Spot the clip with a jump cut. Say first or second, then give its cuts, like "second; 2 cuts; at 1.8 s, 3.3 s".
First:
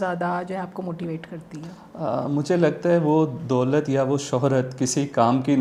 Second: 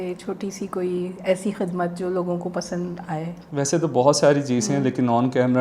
second; 1 cut; at 3.4 s